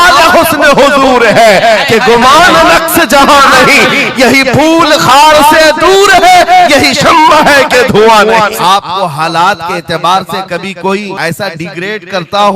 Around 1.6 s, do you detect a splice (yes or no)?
no